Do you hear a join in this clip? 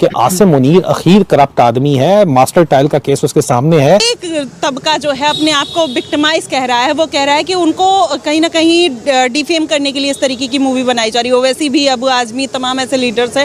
no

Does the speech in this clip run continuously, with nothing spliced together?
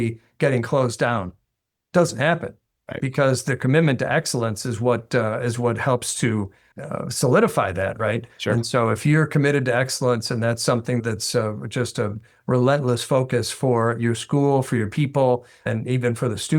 no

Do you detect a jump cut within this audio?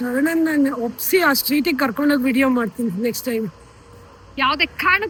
no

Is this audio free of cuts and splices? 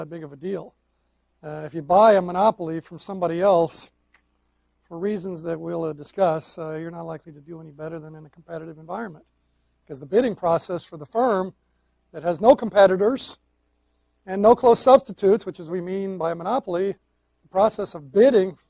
yes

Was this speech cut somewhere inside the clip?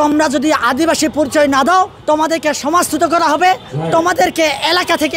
yes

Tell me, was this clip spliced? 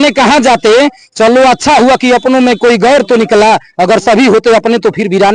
no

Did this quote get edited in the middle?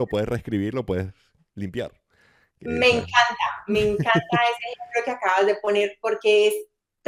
no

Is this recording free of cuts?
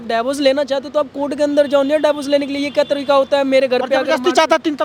yes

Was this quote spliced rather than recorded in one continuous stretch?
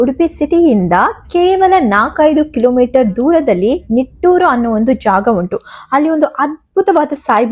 no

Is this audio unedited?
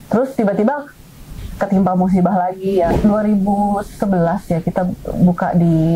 no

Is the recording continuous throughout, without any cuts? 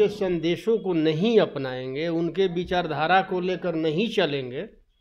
yes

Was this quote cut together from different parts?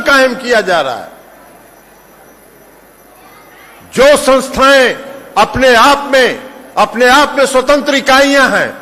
no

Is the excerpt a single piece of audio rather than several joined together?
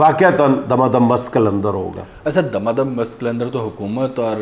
yes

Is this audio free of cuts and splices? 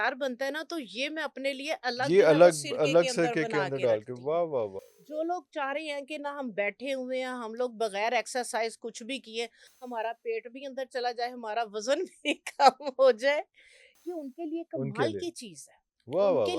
yes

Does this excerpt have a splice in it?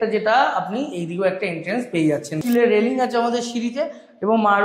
yes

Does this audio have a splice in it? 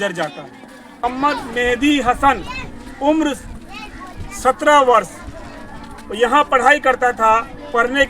yes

